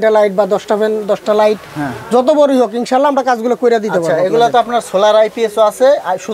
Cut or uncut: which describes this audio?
uncut